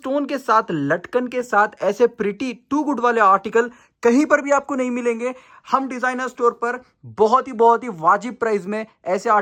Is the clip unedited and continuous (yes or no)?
yes